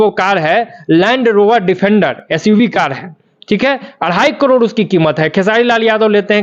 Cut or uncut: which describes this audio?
uncut